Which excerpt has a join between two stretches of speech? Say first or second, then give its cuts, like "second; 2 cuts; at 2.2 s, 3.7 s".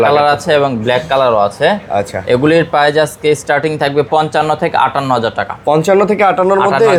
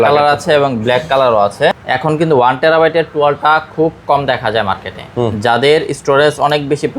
second; 1 cut; at 1.8 s